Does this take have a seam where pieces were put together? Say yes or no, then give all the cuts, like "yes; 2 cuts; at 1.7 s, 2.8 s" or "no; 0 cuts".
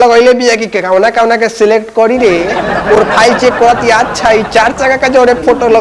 no; 0 cuts